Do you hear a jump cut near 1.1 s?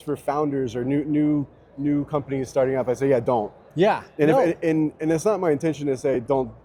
no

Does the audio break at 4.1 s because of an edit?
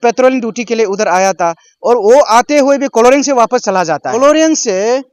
yes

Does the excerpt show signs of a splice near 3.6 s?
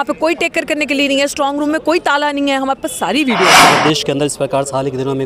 yes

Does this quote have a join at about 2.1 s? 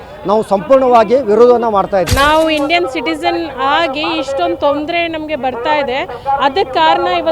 yes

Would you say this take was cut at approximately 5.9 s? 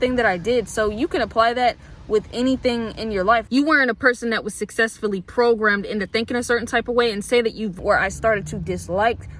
no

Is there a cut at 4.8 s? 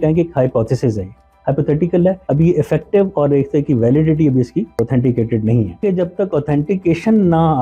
yes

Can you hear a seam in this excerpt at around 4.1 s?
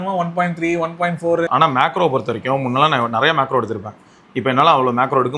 no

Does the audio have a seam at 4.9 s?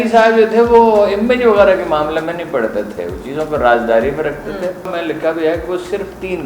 yes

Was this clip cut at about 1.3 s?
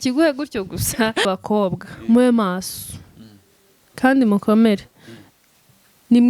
yes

